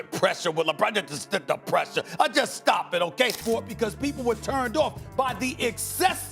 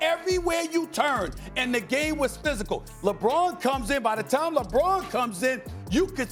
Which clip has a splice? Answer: first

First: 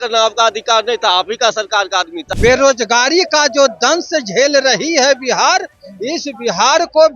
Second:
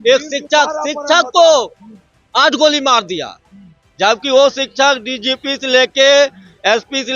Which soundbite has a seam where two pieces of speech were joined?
first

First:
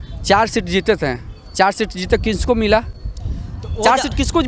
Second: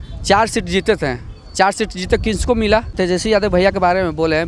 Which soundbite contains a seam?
second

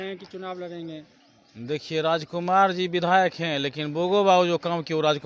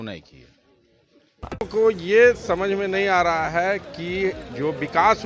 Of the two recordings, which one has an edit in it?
second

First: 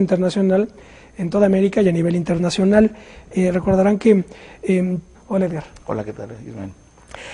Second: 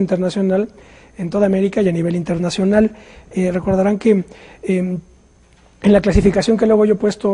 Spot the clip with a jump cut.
second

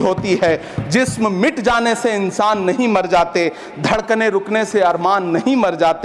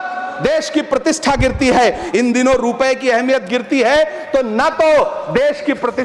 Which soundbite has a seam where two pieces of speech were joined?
second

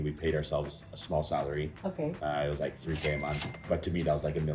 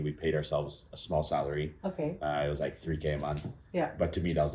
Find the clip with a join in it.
first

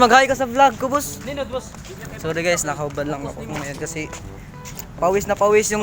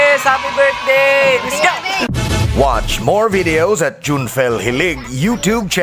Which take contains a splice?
second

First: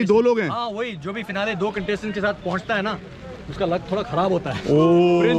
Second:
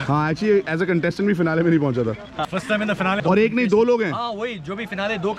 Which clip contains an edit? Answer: second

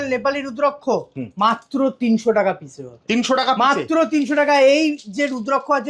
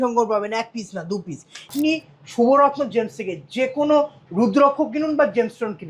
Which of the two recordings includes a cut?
second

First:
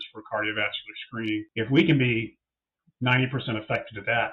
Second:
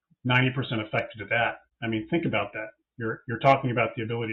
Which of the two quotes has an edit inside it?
first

